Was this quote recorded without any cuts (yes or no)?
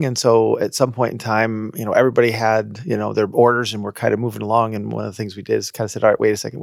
yes